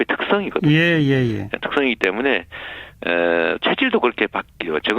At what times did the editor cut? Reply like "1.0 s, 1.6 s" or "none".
3.7 s